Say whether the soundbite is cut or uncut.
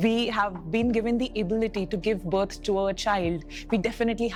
uncut